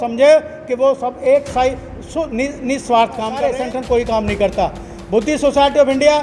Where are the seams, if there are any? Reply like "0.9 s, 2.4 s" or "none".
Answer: 3.3 s